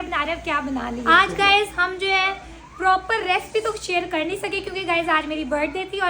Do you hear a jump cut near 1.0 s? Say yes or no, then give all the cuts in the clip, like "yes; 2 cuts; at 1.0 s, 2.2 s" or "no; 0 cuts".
yes; 1 cut; at 1.0 s